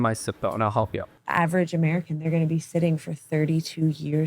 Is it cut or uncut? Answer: cut